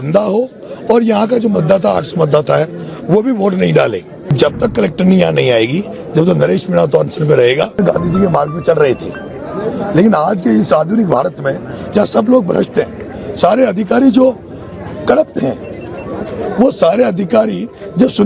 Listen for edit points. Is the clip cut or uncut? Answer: cut